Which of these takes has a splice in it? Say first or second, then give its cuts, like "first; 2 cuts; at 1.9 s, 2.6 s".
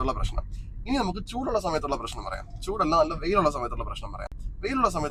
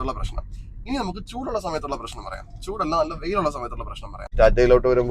second; 1 cut; at 4.2 s